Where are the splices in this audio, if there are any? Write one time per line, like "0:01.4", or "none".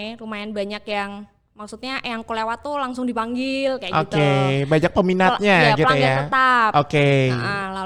none